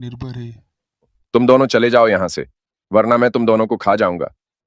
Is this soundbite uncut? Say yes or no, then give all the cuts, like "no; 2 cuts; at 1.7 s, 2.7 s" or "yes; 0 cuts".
no; 1 cut; at 1.2 s